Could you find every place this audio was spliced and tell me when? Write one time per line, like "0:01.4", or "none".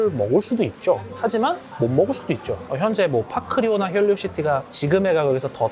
0:02.6